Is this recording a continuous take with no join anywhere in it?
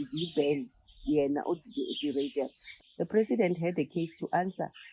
no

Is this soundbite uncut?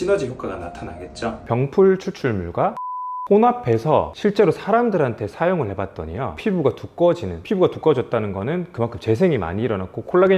no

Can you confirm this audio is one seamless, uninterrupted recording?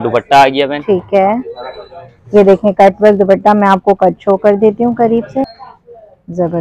no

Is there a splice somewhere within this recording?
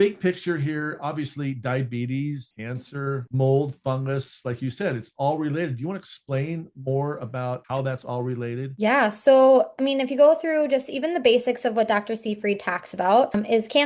no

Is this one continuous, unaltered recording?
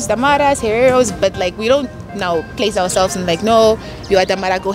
yes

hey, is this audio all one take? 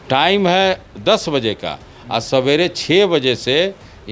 yes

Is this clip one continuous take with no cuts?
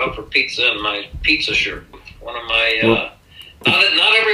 no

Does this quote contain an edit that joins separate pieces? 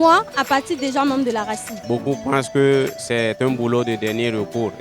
yes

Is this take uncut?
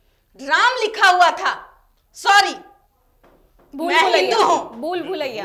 yes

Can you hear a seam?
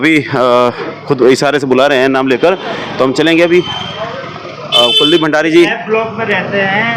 no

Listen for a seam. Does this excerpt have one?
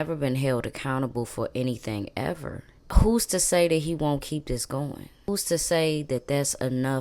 yes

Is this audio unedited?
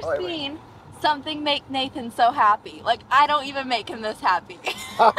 yes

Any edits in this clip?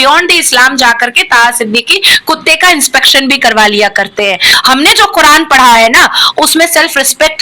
yes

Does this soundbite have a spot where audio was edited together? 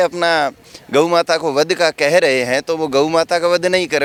no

